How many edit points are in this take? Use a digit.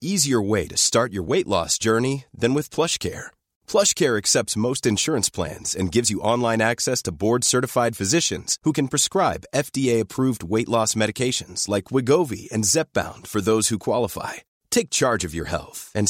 0